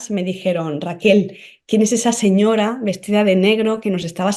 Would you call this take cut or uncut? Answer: uncut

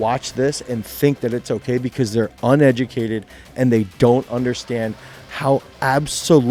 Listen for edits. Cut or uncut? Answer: uncut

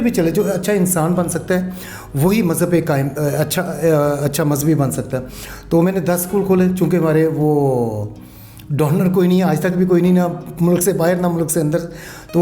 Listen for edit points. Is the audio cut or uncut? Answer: uncut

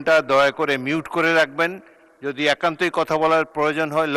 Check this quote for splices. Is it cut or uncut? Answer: uncut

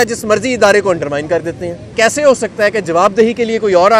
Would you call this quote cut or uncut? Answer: cut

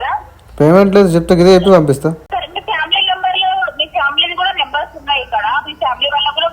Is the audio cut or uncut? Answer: cut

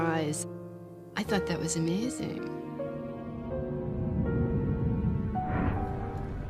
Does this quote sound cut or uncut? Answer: cut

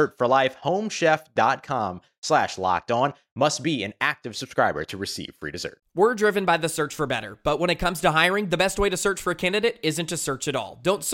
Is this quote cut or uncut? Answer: cut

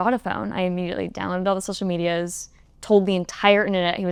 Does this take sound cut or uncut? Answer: uncut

